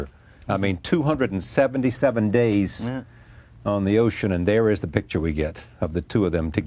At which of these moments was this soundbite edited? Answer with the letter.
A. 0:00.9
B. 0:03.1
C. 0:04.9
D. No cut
B